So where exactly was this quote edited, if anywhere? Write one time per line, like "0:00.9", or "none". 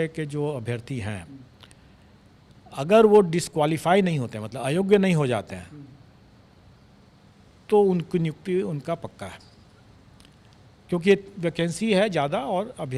none